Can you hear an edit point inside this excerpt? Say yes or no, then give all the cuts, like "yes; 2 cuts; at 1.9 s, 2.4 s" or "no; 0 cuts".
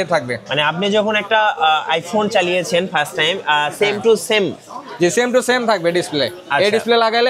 no; 0 cuts